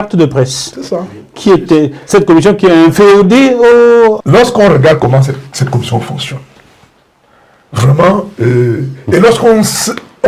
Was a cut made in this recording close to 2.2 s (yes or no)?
no